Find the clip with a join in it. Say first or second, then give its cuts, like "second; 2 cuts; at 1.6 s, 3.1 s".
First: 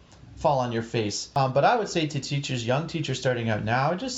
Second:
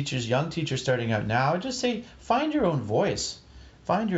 first; 1 cut; at 1.2 s